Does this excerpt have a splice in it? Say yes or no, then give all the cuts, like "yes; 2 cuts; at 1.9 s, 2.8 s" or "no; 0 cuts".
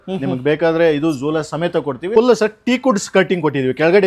yes; 1 cut; at 2.0 s